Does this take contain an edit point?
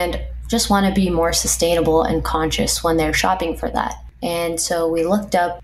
no; 0 cuts

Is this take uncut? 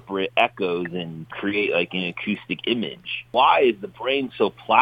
no; 2 cuts; at 1.3 s, 3.2 s

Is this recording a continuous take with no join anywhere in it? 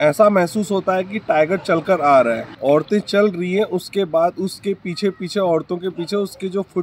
no; 1 cut; at 2.4 s

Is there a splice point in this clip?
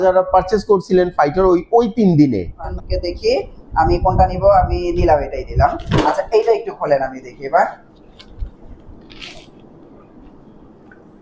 yes; 1 cut; at 2.6 s

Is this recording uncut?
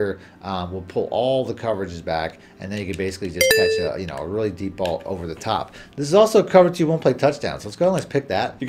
yes; 0 cuts

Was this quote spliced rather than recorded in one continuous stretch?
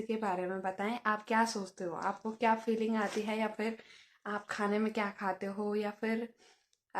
no; 0 cuts

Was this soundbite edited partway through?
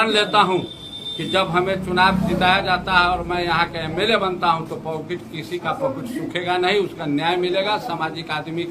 no; 0 cuts

